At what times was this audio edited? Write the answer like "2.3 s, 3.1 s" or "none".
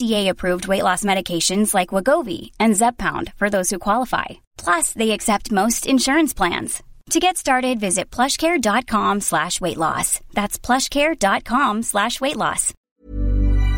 12.7 s